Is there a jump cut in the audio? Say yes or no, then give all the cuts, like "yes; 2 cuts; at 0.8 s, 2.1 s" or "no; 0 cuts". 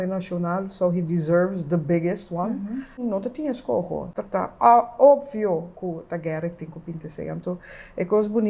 yes; 2 cuts; at 3.0 s, 4.1 s